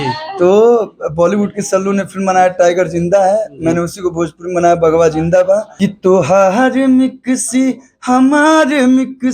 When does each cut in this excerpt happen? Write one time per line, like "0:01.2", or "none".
0:05.7